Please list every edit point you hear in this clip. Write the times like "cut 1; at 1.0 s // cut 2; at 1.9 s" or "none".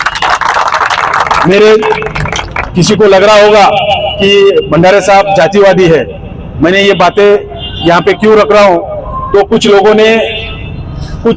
none